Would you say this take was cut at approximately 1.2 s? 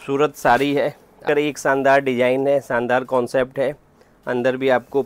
yes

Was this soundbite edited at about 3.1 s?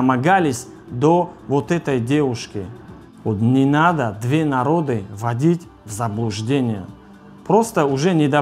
yes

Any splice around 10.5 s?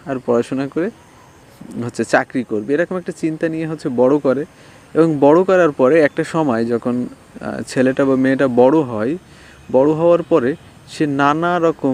no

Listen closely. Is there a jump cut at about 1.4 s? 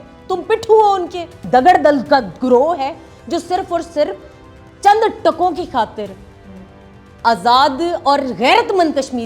yes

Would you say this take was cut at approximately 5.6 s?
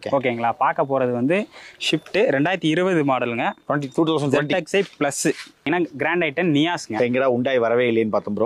yes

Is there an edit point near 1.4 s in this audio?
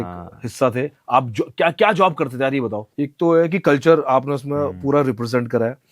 no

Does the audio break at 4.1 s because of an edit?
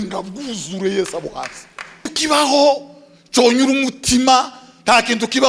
no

